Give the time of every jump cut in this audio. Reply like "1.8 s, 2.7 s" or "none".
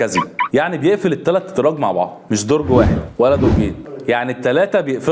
3.9 s